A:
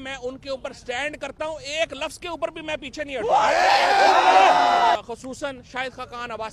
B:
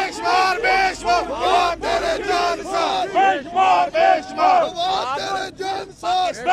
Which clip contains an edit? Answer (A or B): A